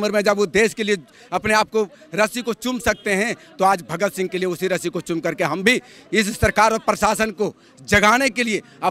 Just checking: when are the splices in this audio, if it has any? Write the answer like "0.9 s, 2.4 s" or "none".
none